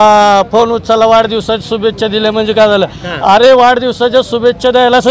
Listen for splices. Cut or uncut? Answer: uncut